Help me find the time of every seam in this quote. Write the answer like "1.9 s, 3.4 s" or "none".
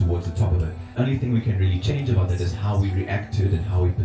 1.0 s